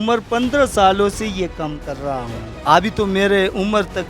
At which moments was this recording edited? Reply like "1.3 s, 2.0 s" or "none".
2.4 s